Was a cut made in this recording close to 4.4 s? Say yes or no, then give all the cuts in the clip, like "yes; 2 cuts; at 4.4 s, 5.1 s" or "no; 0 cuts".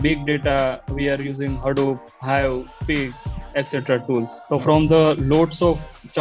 yes; 1 cut; at 4.4 s